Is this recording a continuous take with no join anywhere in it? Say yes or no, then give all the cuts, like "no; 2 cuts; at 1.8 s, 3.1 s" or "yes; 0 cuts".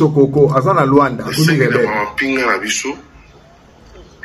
yes; 0 cuts